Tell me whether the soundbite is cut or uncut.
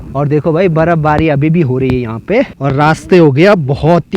cut